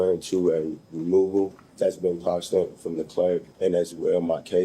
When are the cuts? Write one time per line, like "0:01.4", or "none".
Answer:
0:01.6
0:03.5